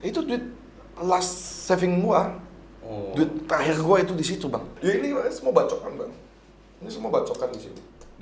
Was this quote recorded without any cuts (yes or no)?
no